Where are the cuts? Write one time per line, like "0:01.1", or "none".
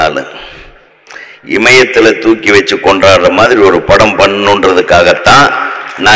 none